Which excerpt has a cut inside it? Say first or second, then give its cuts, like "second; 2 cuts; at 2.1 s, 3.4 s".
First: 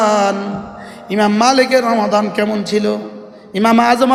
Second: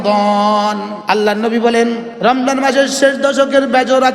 second; 2 cuts; at 0.9 s, 2.1 s